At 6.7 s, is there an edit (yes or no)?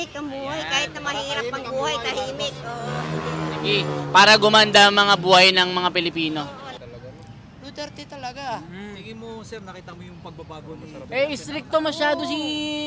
yes